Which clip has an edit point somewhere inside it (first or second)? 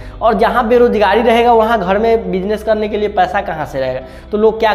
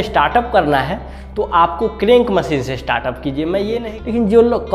second